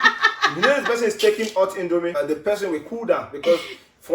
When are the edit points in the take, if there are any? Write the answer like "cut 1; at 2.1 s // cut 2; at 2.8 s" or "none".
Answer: cut 1; at 2.1 s